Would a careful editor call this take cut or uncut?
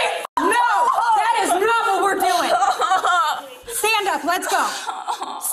uncut